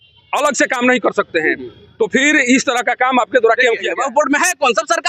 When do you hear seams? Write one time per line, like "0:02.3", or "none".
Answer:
0:03.9